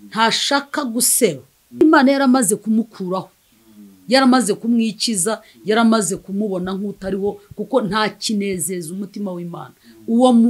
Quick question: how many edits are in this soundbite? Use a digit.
1